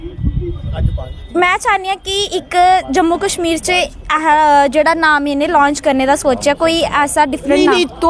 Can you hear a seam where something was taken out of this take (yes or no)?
no